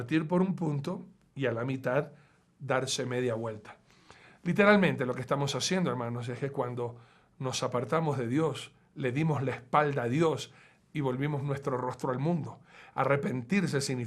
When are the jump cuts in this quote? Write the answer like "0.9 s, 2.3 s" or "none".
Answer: 10.7 s